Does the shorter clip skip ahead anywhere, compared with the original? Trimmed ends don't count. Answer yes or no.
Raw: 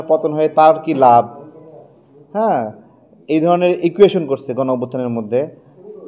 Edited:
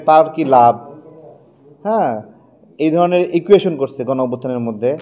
no